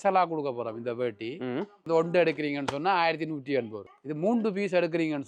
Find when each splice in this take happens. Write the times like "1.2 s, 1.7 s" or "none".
1.9 s